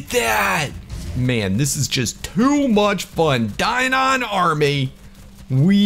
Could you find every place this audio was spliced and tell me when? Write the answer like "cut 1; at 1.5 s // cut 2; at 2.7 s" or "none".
cut 1; at 1.2 s